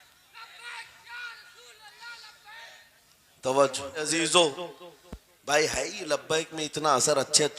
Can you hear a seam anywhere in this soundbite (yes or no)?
yes